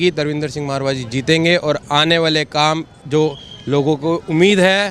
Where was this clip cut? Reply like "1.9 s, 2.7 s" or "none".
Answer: none